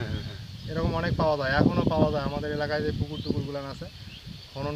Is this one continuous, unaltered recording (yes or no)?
yes